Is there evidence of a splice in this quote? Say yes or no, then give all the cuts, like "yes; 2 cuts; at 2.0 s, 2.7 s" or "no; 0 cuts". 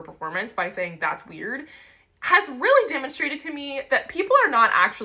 no; 0 cuts